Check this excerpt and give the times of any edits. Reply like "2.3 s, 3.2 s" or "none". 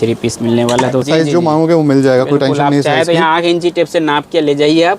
1.1 s